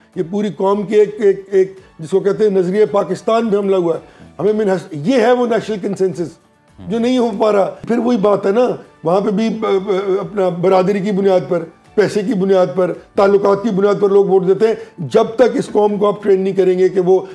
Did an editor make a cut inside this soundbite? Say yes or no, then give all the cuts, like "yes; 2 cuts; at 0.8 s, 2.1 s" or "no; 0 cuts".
yes; 1 cut; at 7.8 s